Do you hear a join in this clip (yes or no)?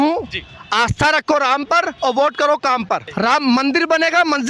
yes